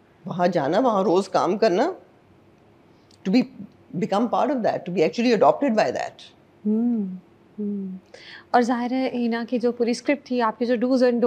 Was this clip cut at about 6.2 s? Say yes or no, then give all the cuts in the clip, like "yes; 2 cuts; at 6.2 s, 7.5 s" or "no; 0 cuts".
no; 0 cuts